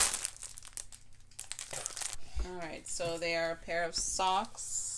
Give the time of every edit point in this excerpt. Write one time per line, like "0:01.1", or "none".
0:02.2